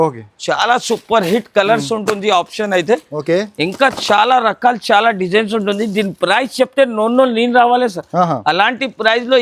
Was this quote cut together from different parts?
no; 0 cuts

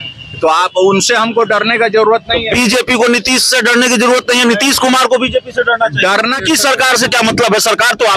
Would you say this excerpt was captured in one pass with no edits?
no; 1 cut; at 6.4 s

